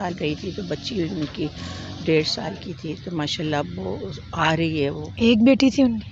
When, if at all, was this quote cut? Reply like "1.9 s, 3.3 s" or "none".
none

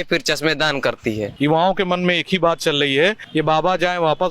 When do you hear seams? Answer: 1.3 s, 3.2 s

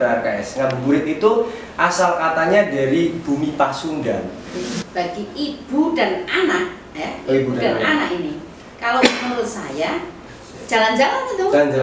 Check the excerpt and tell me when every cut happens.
4.6 s

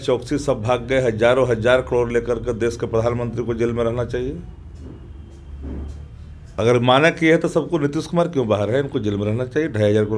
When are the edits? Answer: 6.5 s

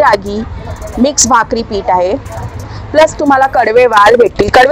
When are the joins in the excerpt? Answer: none

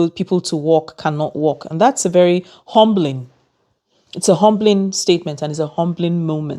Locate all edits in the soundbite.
none

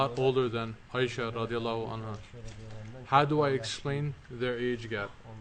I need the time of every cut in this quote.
4.2 s

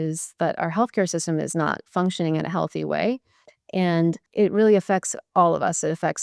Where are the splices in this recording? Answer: 4.2 s

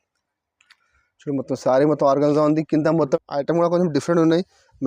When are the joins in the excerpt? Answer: 3.2 s

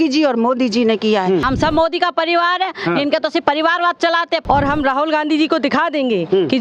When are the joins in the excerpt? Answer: 1.4 s, 4.4 s

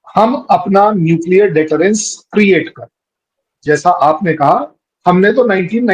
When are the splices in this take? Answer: 3.5 s

